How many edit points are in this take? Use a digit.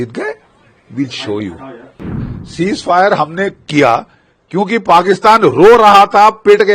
1